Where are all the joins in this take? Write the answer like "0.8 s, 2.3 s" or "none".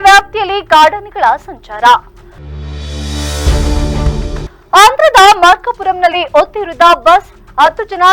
none